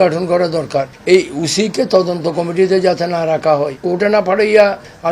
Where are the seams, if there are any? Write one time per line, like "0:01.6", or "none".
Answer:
0:00.9
0:03.8